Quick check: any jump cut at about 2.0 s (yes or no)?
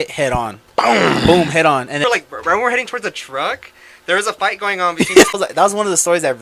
yes